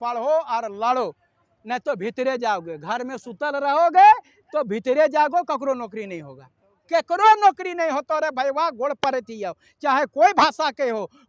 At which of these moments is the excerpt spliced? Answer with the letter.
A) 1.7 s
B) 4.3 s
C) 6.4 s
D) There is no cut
D